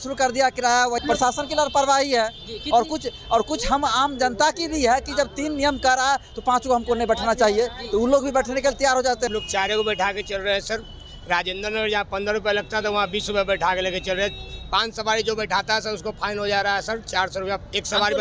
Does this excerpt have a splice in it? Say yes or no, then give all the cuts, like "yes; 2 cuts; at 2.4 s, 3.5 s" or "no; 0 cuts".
yes; 2 cuts; at 1.0 s, 9.3 s